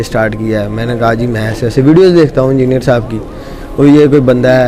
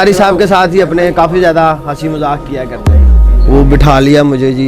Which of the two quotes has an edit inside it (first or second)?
second